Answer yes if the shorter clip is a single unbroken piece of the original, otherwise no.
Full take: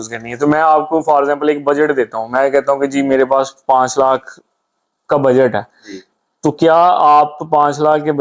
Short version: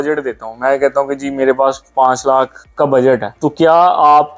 no